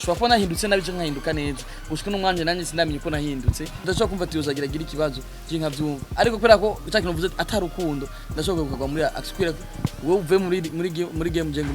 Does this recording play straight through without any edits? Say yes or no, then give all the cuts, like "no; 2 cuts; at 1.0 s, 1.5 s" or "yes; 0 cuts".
no; 1 cut; at 3.8 s